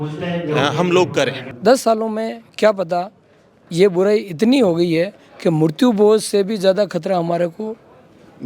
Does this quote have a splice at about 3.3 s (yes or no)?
no